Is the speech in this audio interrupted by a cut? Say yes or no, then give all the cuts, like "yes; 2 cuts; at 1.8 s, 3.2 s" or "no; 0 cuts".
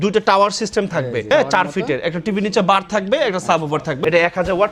yes; 2 cuts; at 1.3 s, 4.0 s